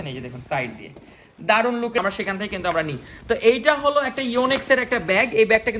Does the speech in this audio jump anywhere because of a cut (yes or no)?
yes